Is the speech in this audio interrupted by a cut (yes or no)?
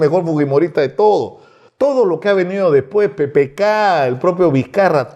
no